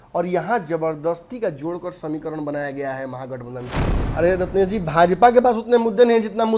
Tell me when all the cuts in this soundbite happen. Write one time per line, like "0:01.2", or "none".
0:03.9